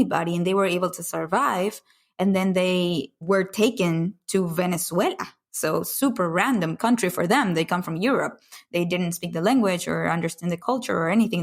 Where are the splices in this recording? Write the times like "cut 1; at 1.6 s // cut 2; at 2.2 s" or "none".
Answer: cut 1; at 3.1 s // cut 2; at 10.6 s

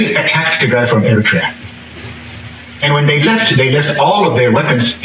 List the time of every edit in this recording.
none

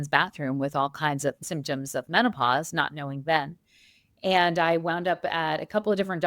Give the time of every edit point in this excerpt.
cut 1; at 1.4 s

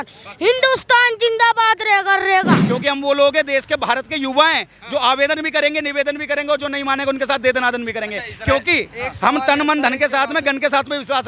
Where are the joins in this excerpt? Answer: cut 1; at 2.6 s

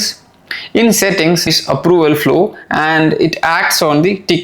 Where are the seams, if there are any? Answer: cut 1; at 1.4 s

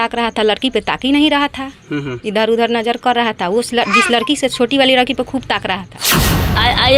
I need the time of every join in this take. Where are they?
cut 1; at 6.1 s

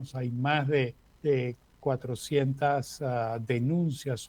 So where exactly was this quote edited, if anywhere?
cut 1; at 1.0 s

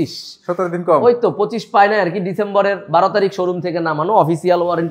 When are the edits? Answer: none

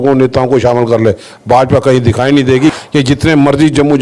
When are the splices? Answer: cut 1; at 2.7 s

